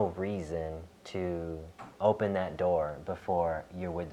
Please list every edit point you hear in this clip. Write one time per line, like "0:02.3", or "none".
0:00.9
0:01.8